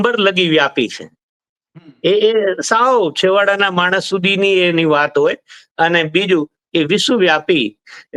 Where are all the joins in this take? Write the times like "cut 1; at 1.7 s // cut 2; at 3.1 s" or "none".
none